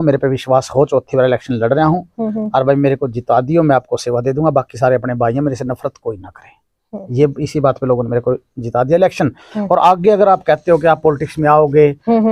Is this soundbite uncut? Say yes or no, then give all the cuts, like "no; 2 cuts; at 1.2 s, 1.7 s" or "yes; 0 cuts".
yes; 0 cuts